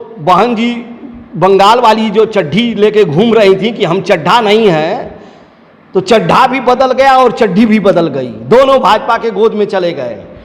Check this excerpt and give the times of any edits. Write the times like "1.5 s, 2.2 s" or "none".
none